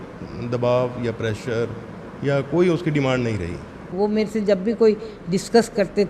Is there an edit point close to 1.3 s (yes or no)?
no